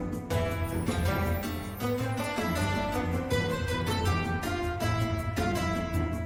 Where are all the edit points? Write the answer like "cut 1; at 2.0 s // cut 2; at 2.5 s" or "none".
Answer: none